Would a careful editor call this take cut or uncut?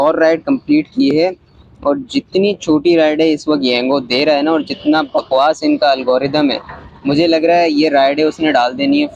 uncut